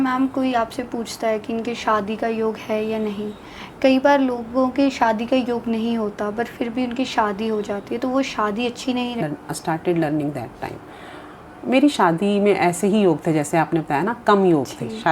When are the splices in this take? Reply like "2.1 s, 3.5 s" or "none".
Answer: 9.2 s